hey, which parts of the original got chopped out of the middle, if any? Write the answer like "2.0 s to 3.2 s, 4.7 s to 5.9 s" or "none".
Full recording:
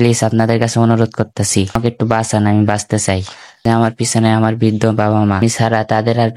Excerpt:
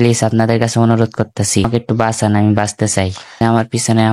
1.7 s to 1.8 s, 3.3 s to 3.5 s